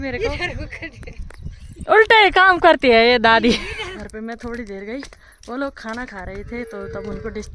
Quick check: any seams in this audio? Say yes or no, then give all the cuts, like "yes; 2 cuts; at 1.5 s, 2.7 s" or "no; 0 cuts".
yes; 1 cut; at 4.0 s